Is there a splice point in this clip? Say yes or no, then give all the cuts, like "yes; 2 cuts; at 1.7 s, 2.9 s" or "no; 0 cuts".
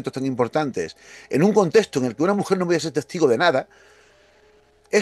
no; 0 cuts